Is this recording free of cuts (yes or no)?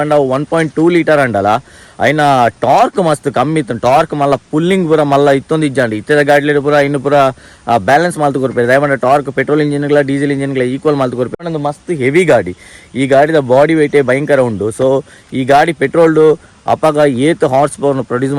yes